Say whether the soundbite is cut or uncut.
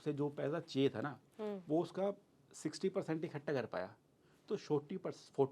uncut